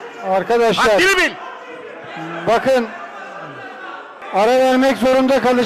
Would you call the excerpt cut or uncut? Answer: cut